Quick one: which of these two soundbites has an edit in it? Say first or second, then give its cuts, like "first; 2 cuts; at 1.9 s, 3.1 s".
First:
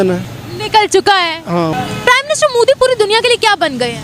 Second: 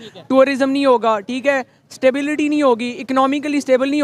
first; 1 cut; at 1.7 s